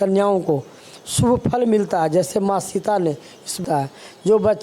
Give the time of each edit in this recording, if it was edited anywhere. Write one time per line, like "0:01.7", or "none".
0:03.6